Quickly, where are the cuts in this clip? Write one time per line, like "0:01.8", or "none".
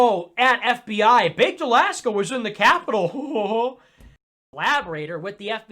0:04.5